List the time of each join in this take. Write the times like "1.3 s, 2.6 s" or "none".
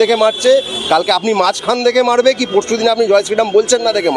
none